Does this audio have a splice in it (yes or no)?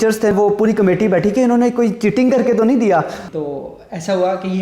yes